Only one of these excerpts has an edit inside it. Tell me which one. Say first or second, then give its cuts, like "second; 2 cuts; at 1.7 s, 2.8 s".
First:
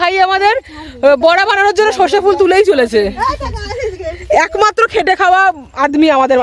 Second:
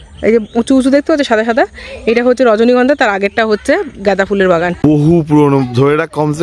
second; 1 cut; at 4.8 s